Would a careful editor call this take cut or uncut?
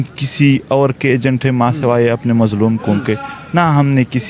uncut